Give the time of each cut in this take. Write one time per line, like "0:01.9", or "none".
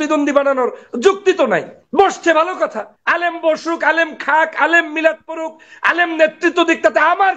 0:01.8
0:02.9